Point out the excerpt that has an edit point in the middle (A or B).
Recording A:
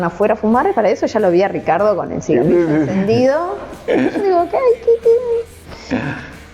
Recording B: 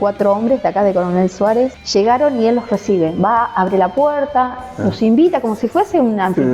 B